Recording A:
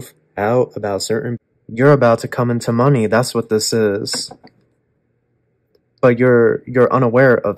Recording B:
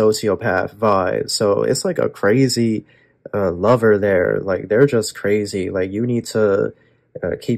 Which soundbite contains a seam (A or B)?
A